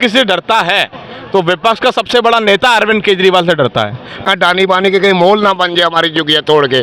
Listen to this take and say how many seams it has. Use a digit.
1